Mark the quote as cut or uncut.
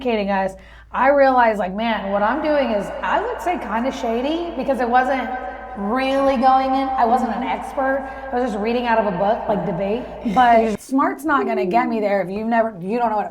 cut